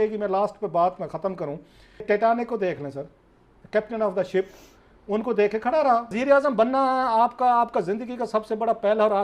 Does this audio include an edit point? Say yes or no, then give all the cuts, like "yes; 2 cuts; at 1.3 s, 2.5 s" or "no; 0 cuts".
yes; 2 cuts; at 2.0 s, 6.2 s